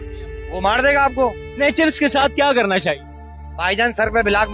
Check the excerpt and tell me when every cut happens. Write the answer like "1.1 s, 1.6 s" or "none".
1.4 s